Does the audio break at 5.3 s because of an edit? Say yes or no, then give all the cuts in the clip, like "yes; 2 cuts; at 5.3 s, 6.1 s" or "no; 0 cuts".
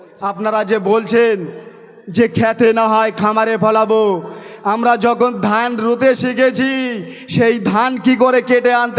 no; 0 cuts